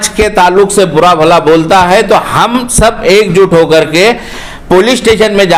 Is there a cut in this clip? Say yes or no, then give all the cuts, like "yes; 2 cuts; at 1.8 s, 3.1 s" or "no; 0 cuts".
no; 0 cuts